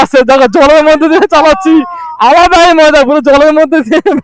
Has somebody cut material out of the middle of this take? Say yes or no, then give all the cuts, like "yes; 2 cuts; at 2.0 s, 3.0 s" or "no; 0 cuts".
no; 0 cuts